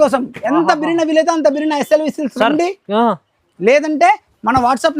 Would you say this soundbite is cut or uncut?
uncut